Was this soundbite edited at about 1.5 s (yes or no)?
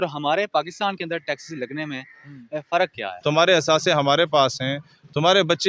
no